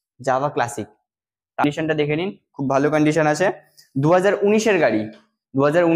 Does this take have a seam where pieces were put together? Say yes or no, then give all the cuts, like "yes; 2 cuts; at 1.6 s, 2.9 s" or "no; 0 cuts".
yes; 1 cut; at 1.6 s